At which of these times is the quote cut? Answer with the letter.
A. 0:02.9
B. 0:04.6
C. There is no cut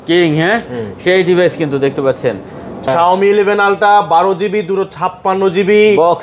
A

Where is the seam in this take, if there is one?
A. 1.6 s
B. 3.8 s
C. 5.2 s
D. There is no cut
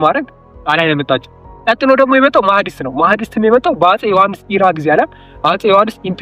D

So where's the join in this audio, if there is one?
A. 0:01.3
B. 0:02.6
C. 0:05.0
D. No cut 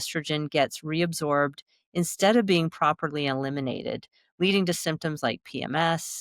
D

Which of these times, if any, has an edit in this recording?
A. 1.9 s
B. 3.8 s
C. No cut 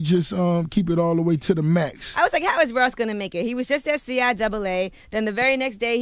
B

